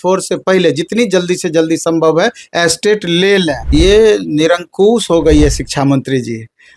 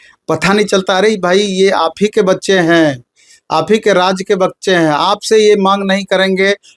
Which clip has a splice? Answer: first; 1 cut; at 3.6 s

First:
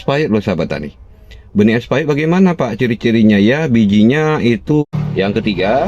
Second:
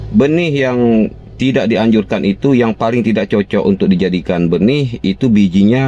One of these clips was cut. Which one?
first; 1 cut; at 4.9 s

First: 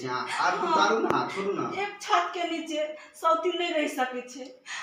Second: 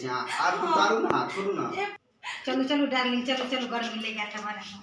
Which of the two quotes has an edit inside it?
second; 1 cut; at 2.0 s

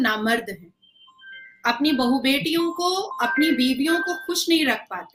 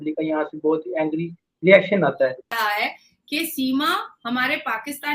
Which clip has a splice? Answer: second; 1 cut; at 2.5 s

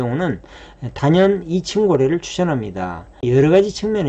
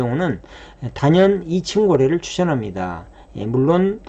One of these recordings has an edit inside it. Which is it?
first; 1 cut; at 3.1 s

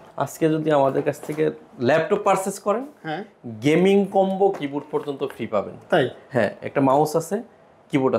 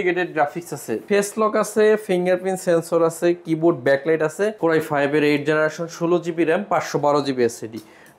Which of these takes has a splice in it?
second; 2 cuts; at 0.9 s, 4.6 s

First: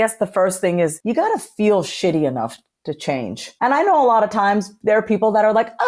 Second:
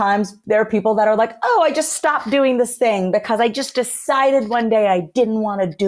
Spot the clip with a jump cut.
first; 2 cuts; at 1.0 s, 3.4 s

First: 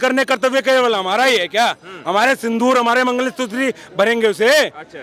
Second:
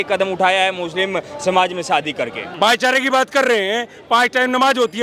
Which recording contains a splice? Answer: second; 1 cut; at 2.4 s

